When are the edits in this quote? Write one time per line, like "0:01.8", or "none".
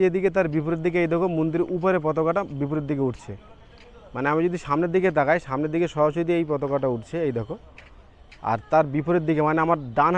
none